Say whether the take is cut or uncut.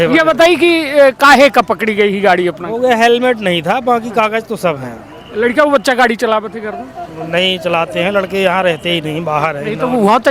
uncut